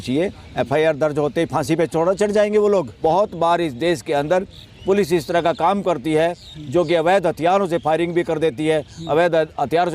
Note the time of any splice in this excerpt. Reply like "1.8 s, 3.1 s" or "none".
2.9 s

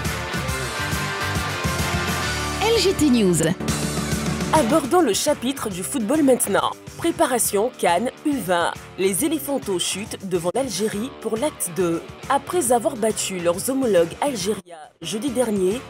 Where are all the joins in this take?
3.4 s

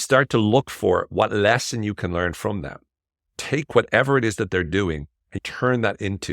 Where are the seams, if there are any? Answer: 3.3 s, 5.4 s

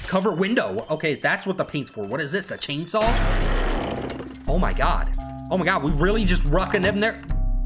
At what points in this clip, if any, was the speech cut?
none

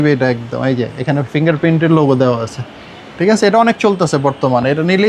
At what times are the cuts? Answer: none

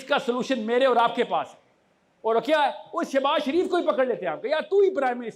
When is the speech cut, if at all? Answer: none

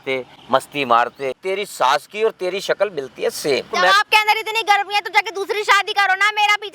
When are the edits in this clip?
1.4 s, 3.8 s

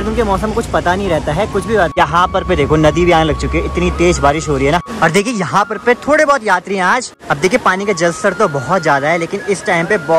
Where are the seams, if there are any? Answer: 1.9 s, 4.9 s, 7.1 s

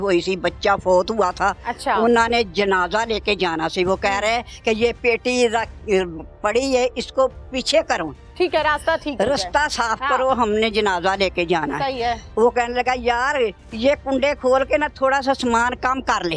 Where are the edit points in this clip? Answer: 1.7 s, 12.2 s

